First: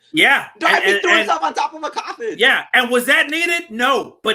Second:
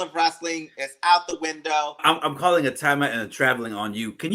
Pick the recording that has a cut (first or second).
second